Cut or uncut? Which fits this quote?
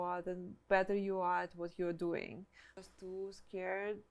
cut